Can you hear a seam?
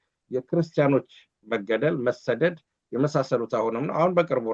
no; 0 cuts

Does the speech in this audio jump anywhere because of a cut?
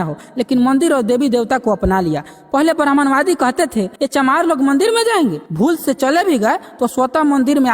yes; 2 cuts; at 4.0 s, 5.4 s

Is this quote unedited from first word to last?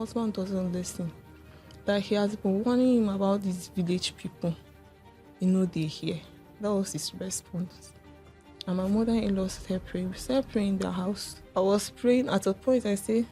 no; 1 cut; at 11.3 s

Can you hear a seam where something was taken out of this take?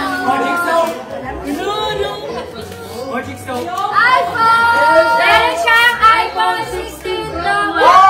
no; 0 cuts

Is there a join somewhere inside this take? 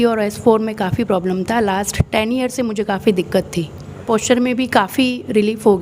yes; 1 cut; at 4.1 s

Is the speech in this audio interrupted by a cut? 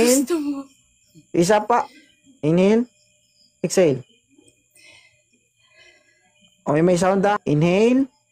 yes; 1 cut; at 7.4 s

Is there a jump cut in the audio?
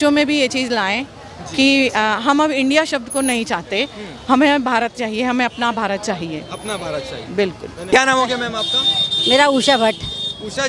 no; 0 cuts

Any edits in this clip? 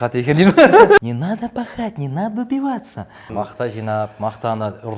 yes; 2 cuts; at 1.0 s, 3.3 s

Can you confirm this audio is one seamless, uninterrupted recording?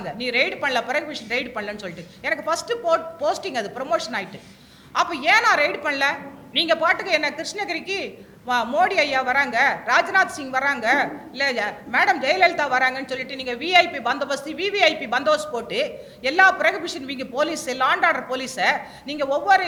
yes; 0 cuts

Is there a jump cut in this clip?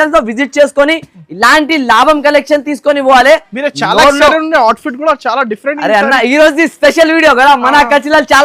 no; 0 cuts

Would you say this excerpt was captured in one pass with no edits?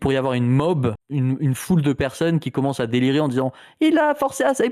no; 1 cut; at 1.0 s

